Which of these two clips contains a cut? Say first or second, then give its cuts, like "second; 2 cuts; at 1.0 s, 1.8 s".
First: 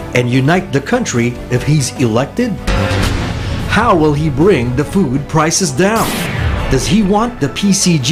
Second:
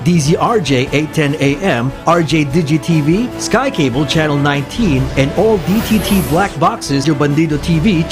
second; 1 cut; at 7.0 s